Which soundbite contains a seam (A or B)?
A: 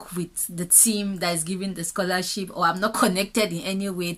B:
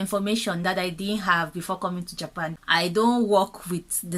B